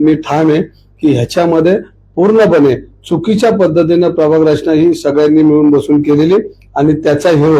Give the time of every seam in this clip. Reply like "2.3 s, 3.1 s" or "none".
none